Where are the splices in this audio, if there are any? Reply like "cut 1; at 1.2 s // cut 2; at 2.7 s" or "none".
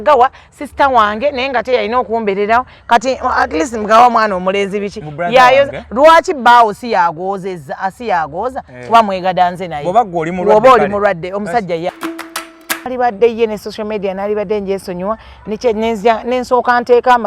cut 1; at 12.3 s